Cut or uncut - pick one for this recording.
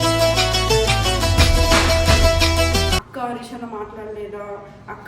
cut